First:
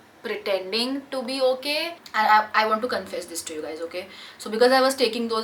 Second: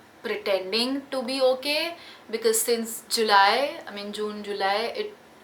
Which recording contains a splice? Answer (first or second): first